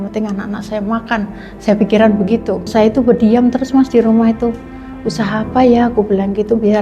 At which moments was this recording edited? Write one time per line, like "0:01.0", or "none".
0:02.7